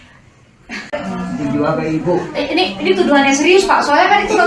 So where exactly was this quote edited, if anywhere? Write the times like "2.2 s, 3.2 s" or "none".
0.9 s